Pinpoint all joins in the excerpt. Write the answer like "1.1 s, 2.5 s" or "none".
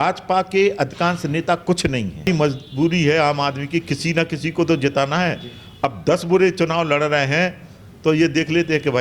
2.3 s